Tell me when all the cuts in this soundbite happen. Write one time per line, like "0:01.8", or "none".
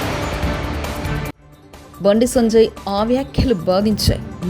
none